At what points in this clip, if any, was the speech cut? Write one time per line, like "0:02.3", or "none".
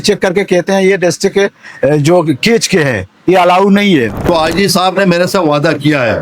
0:04.2